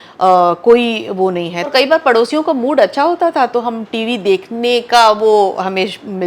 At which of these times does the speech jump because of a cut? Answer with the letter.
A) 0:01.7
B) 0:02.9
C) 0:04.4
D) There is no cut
A